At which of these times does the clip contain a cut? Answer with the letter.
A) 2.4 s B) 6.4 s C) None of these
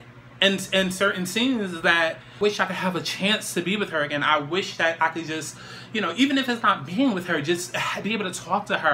A